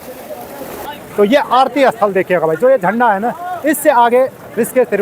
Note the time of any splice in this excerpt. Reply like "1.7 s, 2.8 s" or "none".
0.9 s